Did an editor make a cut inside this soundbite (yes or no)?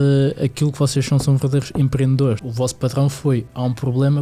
yes